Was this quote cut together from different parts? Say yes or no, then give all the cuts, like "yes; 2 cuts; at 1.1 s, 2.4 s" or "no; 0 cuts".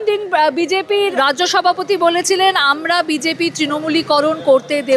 yes; 1 cut; at 1.1 s